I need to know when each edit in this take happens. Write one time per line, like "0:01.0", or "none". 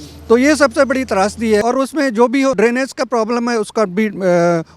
0:01.6
0:02.6